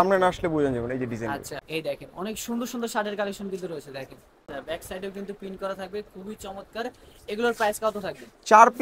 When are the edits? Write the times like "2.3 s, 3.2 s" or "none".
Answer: 1.6 s, 4.4 s